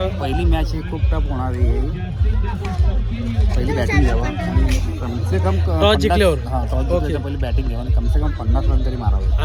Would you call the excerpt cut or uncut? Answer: uncut